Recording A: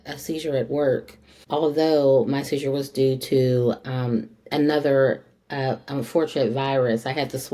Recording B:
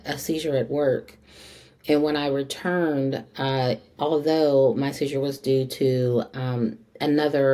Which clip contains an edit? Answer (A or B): A